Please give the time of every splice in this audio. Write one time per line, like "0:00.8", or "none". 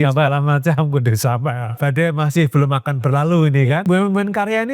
0:01.8
0:03.8